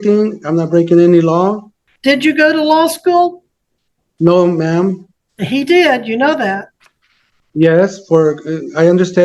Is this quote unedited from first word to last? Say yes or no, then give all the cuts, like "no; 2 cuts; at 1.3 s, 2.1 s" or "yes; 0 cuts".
no; 1 cut; at 1.8 s